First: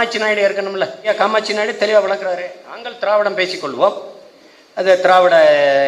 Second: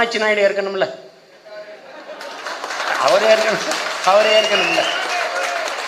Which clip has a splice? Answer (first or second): first